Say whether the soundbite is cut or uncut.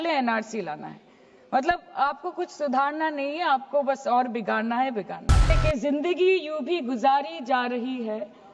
cut